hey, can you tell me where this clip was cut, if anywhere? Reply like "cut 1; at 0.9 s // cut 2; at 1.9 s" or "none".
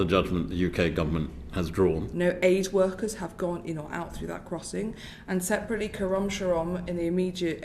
cut 1; at 2.1 s